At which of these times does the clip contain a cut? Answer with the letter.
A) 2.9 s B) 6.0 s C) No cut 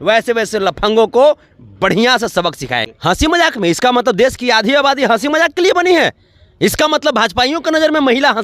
A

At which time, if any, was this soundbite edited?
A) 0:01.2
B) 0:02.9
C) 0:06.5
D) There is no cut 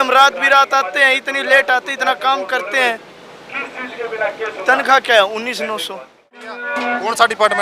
C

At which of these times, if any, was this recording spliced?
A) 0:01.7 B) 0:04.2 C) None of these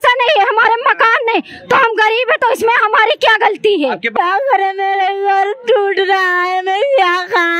B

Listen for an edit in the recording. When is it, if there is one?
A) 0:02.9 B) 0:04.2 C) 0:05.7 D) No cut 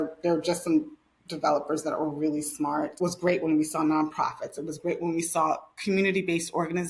A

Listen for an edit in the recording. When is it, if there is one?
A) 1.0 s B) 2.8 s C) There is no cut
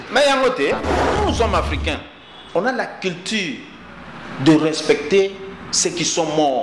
A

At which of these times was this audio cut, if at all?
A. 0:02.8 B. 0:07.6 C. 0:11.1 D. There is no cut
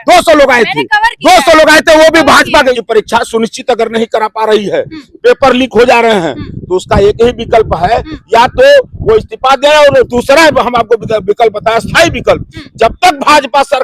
A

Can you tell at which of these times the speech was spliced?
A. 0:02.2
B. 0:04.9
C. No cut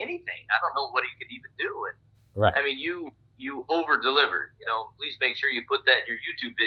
C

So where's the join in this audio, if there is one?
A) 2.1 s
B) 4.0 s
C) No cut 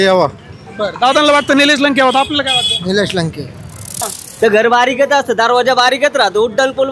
B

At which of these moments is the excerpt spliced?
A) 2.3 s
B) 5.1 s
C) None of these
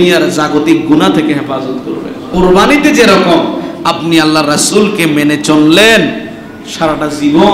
A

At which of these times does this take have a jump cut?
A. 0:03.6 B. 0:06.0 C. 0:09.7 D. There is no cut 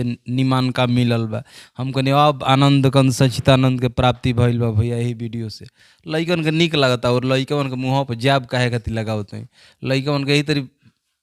D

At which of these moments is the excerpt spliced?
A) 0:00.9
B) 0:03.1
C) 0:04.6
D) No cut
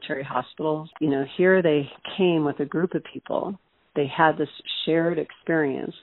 A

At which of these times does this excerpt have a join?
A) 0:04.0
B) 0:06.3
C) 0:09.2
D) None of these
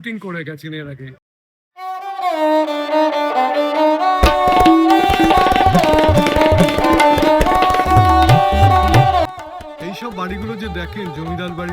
C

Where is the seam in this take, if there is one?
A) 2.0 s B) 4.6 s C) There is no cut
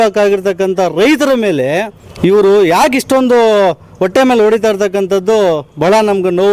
A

